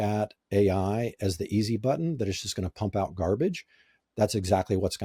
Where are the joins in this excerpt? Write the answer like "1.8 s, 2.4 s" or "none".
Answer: none

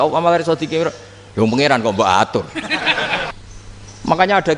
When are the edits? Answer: 3.3 s

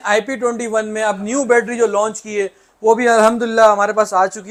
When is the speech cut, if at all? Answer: none

